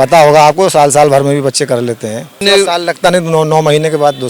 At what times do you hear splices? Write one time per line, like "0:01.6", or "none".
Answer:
0:02.4